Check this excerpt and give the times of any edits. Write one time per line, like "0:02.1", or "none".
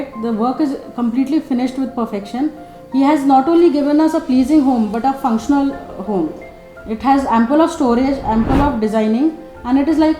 none